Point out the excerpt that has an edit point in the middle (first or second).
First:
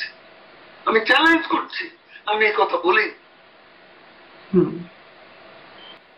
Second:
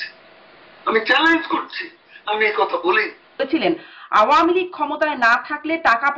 second